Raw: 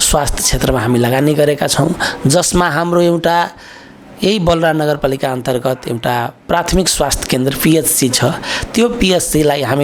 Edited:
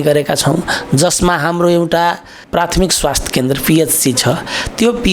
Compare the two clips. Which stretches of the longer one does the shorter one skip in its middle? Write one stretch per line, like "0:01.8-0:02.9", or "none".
0:03.7-0:06.3